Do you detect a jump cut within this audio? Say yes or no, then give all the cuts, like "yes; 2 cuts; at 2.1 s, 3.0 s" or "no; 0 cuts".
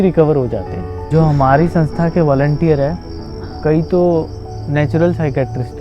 yes; 1 cut; at 1.1 s